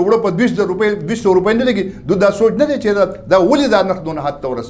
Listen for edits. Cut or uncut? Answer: uncut